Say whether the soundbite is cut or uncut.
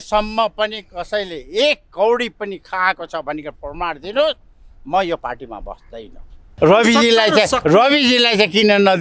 cut